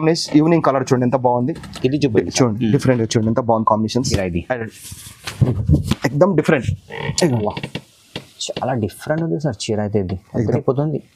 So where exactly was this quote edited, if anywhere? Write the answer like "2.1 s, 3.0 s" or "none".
4.1 s